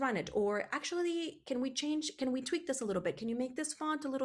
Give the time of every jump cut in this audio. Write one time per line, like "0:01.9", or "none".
none